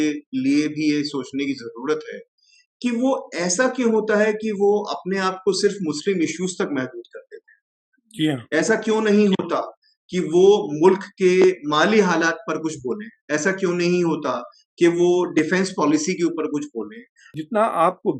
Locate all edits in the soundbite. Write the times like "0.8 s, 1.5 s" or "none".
17.2 s